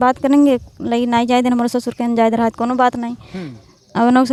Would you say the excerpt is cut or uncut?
uncut